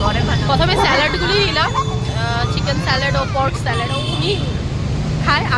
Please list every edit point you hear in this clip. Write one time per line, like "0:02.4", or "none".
none